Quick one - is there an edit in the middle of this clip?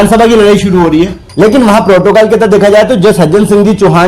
yes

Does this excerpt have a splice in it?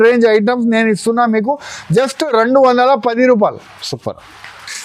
no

